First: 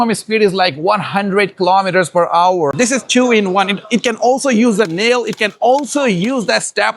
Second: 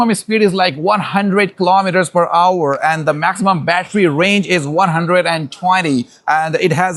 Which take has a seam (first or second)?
first